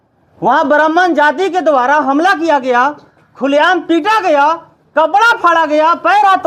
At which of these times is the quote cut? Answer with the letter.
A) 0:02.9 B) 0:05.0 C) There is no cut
C